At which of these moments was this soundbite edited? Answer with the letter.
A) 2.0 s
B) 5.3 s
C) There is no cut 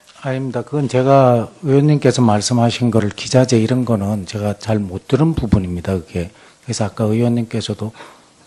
C